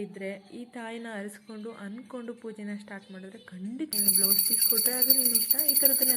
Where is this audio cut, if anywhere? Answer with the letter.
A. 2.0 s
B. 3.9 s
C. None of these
B